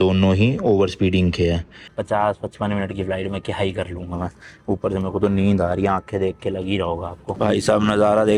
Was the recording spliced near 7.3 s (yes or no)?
yes